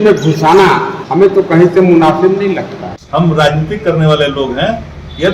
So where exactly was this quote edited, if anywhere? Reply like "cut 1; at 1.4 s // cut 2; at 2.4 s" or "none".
cut 1; at 1.0 s // cut 2; at 3.0 s